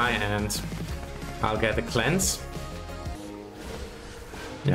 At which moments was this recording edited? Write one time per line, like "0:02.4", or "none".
0:03.1